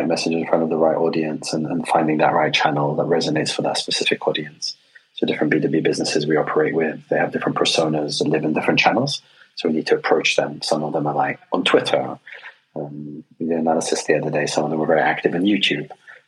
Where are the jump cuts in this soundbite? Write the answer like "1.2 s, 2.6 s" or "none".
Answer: none